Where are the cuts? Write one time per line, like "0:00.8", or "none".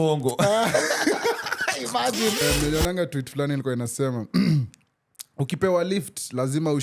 0:02.4